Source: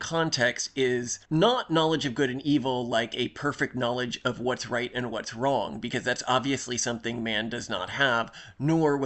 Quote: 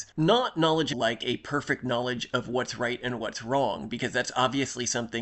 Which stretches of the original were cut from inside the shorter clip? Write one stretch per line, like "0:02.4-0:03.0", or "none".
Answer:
0:02.1-0:02.9